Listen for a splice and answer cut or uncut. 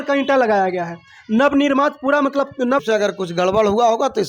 cut